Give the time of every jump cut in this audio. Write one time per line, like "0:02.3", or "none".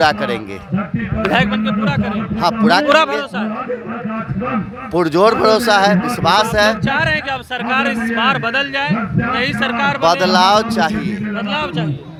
none